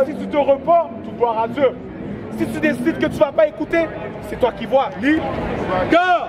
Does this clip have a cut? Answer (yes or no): yes